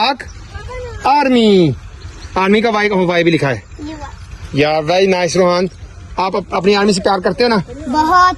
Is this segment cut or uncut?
uncut